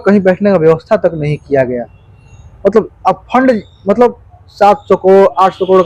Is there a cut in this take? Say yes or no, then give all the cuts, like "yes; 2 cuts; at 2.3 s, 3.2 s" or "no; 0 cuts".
no; 0 cuts